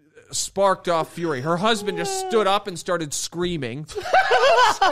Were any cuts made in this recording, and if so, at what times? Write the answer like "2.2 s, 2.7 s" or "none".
none

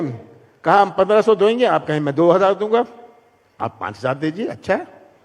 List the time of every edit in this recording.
none

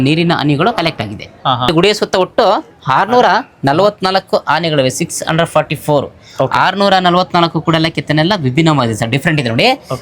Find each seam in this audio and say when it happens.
1.7 s

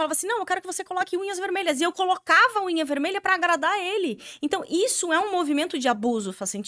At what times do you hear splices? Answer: none

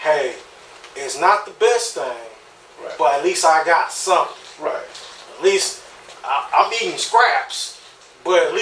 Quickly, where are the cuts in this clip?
none

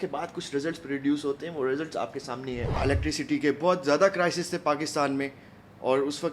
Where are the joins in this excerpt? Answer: 2.8 s

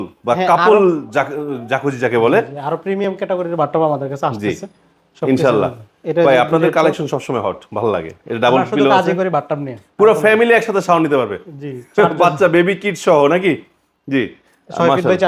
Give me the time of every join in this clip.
none

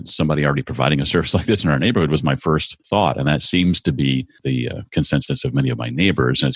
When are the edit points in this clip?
2.7 s, 4.3 s

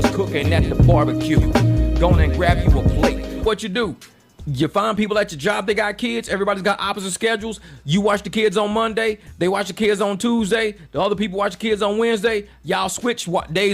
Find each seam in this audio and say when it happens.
3.4 s

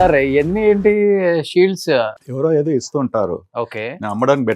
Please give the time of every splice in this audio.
2.2 s

